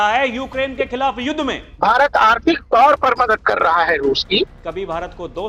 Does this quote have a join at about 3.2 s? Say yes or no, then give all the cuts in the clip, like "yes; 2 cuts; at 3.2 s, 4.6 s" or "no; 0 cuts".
no; 2 cuts; at 1.6 s, 4.6 s